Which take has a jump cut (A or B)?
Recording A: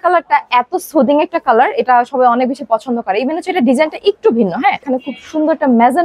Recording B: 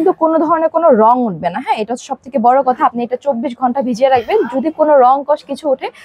A